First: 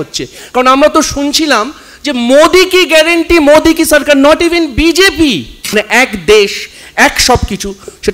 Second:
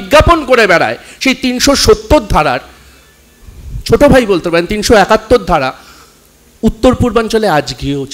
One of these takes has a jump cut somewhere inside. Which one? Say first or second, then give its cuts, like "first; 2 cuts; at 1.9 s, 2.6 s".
first; 1 cut; at 5.7 s